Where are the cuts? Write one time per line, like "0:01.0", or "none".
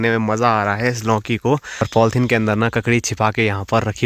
0:01.9